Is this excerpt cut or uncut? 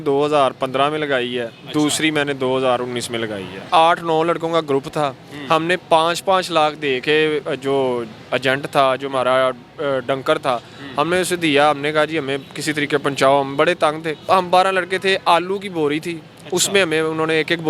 cut